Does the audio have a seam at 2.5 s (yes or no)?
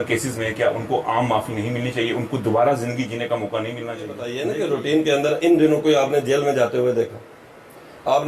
no